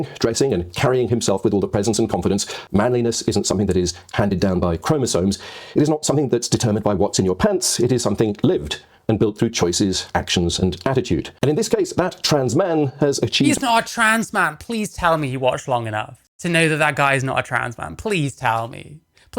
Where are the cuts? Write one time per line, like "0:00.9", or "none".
0:02.5
0:11.3